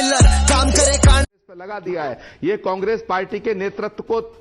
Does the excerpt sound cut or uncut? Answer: cut